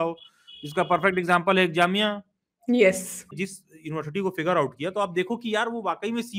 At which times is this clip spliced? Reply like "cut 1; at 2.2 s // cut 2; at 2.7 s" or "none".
cut 1; at 3.3 s